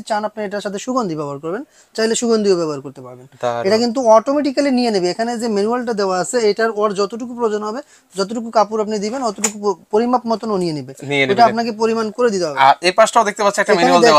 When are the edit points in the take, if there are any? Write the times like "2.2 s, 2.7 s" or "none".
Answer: none